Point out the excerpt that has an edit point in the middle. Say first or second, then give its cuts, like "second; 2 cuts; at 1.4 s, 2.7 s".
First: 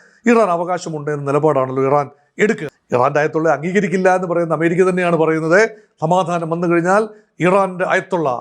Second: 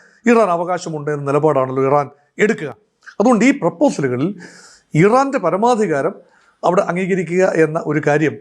first; 1 cut; at 2.7 s